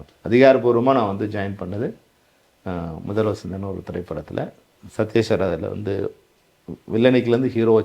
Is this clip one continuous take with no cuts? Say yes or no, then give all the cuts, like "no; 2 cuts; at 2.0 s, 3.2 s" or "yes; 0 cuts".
yes; 0 cuts